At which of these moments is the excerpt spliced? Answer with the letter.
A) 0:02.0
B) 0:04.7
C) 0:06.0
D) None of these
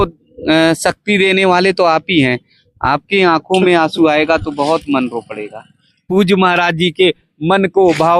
C